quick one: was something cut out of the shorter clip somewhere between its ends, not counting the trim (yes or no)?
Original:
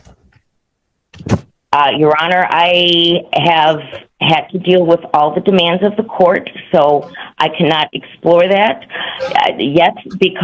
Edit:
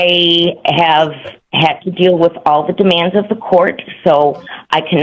no